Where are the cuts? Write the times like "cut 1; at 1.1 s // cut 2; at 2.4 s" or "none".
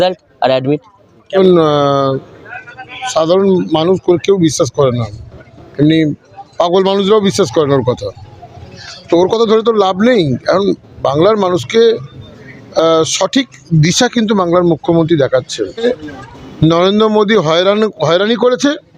cut 1; at 1.4 s // cut 2; at 15.8 s